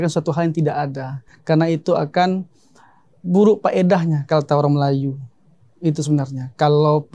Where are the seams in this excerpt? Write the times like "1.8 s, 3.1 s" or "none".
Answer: none